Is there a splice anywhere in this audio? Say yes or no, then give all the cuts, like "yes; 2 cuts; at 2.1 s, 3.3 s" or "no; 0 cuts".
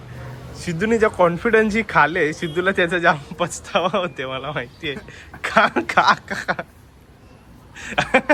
no; 0 cuts